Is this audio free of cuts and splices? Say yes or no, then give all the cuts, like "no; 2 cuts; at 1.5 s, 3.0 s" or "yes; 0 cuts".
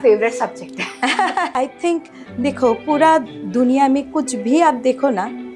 no; 1 cut; at 1.5 s